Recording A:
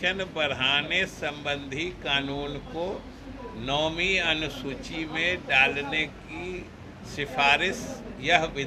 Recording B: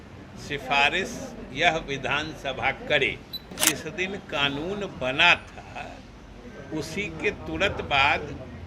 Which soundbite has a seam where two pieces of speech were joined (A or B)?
B